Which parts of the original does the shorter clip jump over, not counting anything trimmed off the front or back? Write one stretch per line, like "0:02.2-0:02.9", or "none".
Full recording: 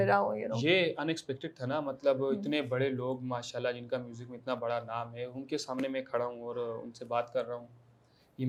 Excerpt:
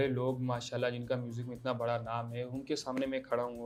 none